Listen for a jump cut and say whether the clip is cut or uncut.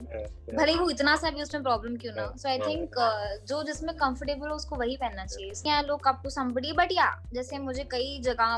cut